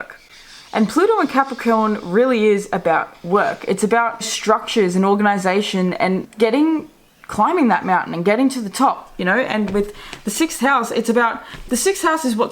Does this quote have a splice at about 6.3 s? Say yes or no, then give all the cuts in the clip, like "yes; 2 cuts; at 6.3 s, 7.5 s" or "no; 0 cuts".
yes; 2 cuts; at 4.3 s, 6.3 s